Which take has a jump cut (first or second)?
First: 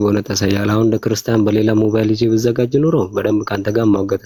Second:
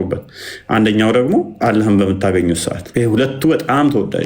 second